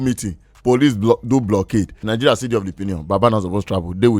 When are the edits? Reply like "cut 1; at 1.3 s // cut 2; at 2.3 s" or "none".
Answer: cut 1; at 2.1 s